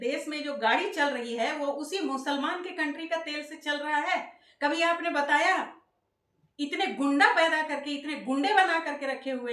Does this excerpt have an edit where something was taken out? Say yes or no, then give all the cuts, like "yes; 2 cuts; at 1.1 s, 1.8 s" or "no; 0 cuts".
no; 0 cuts